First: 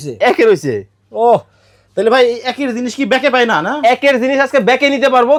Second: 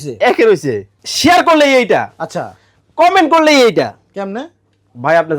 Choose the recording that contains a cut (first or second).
second